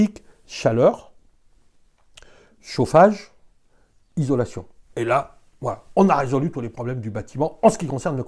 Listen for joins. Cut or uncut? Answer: uncut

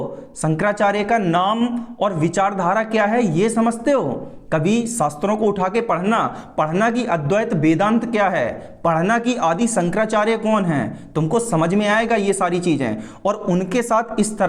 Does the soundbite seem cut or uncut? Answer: uncut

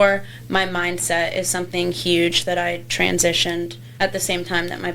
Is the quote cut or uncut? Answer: cut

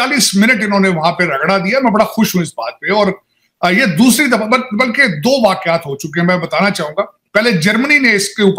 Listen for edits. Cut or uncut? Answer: uncut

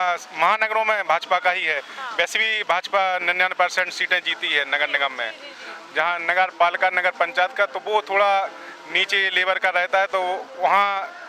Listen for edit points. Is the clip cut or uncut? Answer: uncut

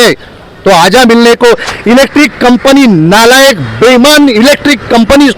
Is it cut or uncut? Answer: cut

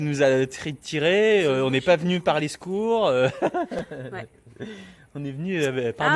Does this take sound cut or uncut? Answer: uncut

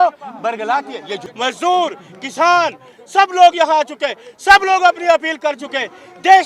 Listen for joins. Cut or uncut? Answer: cut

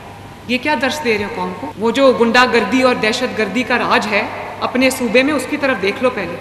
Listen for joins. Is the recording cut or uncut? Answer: cut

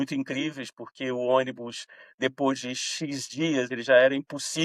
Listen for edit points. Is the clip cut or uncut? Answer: uncut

